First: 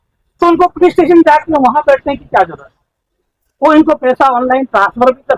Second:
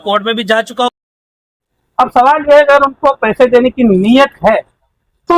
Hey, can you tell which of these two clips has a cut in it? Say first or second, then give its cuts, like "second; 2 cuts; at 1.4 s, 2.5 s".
second; 1 cut; at 1.3 s